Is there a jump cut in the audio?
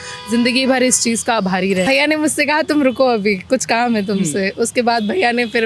yes; 1 cut; at 1.9 s

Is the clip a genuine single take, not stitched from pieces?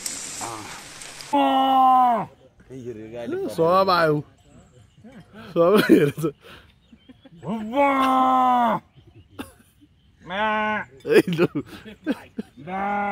yes; 0 cuts

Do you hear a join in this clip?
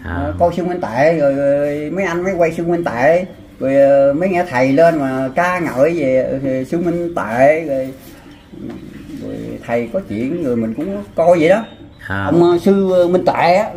yes; 1 cut; at 12.2 s

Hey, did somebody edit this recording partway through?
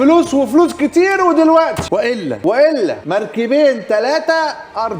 yes; 2 cuts; at 1.9 s, 3.0 s

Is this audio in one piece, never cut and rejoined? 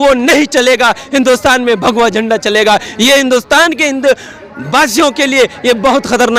yes; 0 cuts

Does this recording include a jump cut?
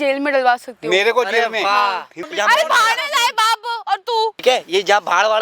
yes; 2 cuts; at 2.1 s, 4.4 s

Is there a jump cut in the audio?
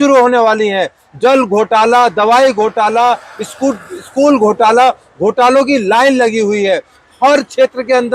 no; 0 cuts

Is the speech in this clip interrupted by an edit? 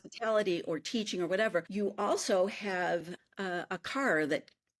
yes; 2 cuts; at 1.7 s, 3.2 s

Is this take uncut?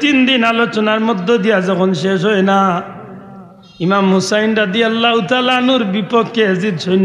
yes; 0 cuts

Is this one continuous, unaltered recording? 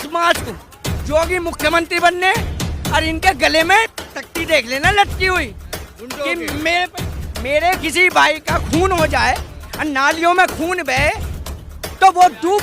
no; 1 cut; at 7.1 s

